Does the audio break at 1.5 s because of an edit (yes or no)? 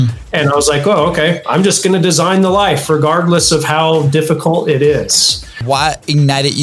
no